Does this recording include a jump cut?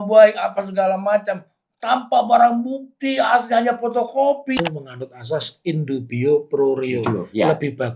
yes; 1 cut; at 4.6 s

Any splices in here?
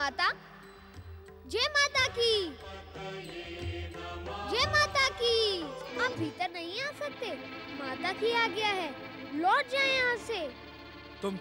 yes; 1 cut; at 5.8 s

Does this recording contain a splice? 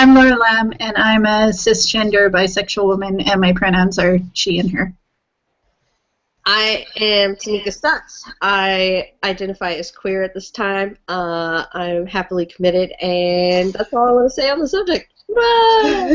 no; 0 cuts

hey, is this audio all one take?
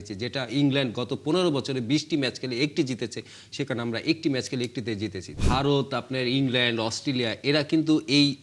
no; 1 cut; at 5.4 s

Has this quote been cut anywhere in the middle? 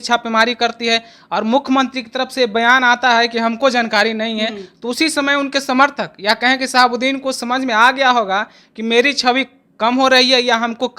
no; 0 cuts

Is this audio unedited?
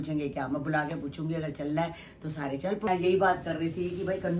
no; 1 cut; at 2.9 s

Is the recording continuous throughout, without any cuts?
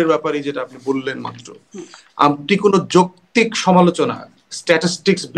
yes; 0 cuts

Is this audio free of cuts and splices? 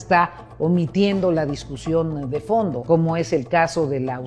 no; 1 cut; at 2.8 s

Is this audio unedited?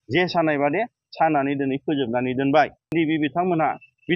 no; 1 cut; at 2.9 s

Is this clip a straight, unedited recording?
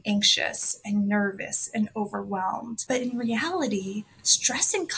yes; 0 cuts

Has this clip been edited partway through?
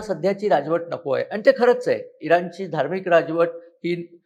no; 0 cuts

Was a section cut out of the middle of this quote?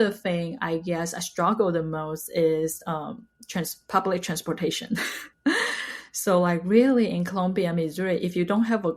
no; 0 cuts

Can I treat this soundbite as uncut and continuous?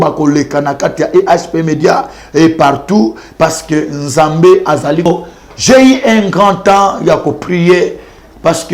no; 1 cut; at 5.1 s

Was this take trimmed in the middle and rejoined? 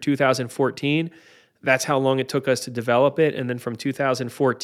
no; 0 cuts

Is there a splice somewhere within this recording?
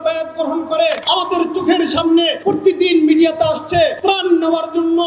yes; 3 cuts; at 1.0 s, 2.3 s, 4.0 s

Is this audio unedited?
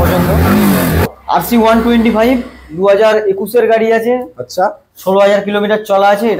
no; 1 cut; at 1.1 s

